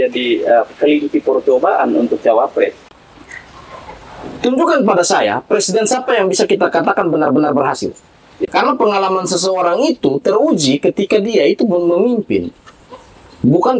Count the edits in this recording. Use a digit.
2